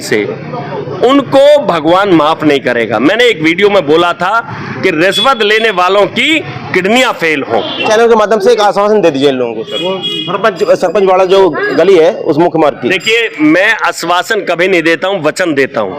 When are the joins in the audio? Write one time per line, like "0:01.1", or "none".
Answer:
0:07.8